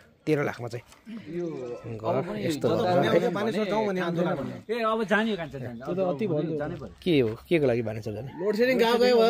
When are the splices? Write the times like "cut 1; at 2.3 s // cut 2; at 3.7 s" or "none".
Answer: cut 1; at 1.3 s